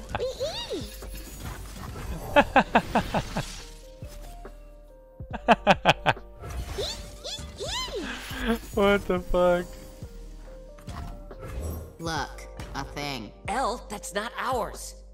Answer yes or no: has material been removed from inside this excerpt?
no